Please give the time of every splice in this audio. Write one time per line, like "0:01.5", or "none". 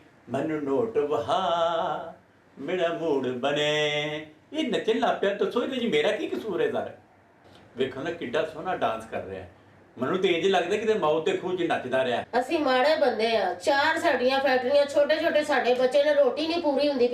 0:12.3